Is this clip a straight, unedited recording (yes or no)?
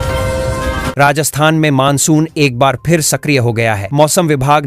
no